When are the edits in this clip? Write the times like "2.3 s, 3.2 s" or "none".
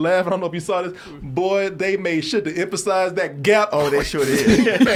none